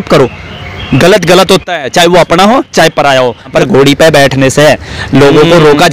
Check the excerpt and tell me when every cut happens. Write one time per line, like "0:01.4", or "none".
0:03.5

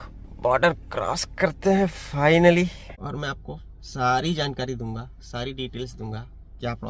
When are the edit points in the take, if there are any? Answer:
0:02.9

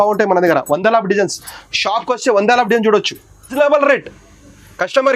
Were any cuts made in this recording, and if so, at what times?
0:03.5

